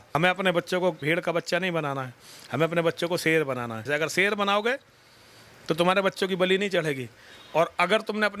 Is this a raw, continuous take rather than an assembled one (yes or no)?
no